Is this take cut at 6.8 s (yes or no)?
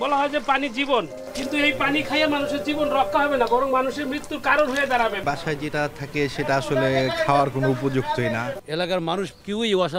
no